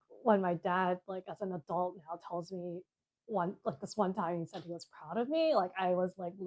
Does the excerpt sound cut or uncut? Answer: uncut